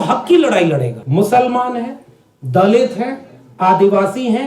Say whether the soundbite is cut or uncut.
cut